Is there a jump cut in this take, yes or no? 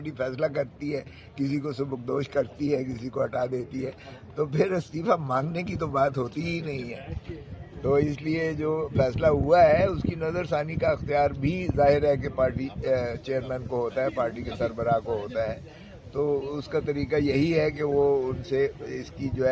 no